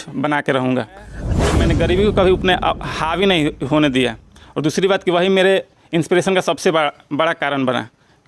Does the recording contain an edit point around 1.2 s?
yes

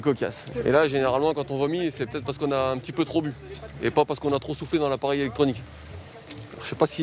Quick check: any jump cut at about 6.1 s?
no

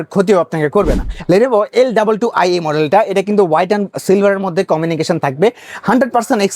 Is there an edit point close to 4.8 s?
no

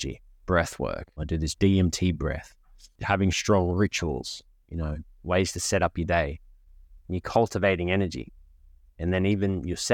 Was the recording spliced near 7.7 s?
no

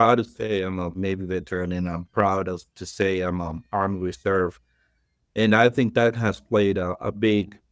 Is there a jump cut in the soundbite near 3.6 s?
no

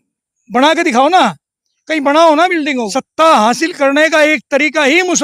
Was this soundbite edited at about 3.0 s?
yes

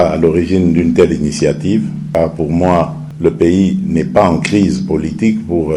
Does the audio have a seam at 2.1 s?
yes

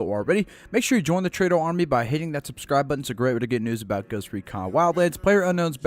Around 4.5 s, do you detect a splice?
no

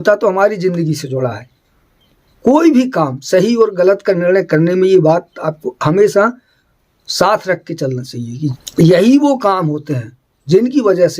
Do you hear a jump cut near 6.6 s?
no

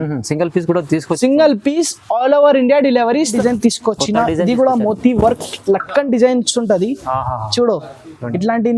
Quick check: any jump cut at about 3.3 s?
yes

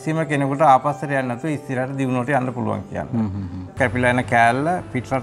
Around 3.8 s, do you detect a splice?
yes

